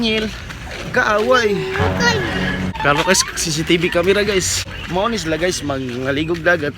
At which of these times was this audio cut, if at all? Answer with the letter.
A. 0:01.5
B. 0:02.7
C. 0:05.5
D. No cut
B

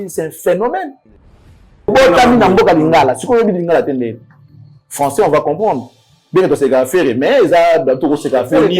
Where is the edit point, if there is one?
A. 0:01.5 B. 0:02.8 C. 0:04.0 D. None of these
A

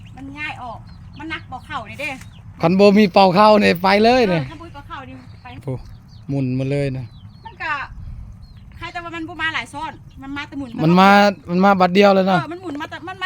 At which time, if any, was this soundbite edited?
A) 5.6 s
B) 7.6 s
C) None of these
A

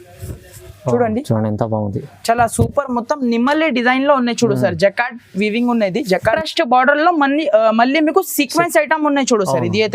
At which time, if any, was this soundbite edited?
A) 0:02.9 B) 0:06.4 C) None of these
B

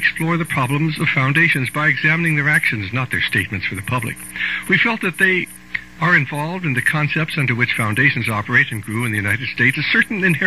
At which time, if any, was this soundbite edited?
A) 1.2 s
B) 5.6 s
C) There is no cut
C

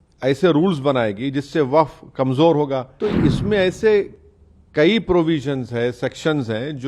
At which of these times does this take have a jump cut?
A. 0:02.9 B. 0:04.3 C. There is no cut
A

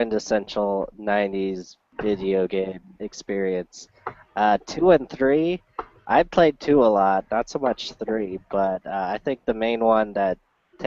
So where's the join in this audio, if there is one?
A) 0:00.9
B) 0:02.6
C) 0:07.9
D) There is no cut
C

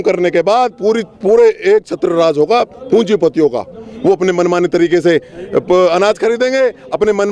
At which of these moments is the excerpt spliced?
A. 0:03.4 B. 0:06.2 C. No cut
C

